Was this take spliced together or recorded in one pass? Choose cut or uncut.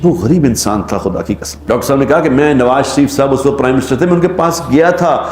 cut